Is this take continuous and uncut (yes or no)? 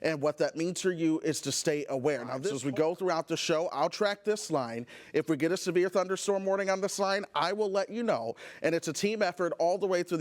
no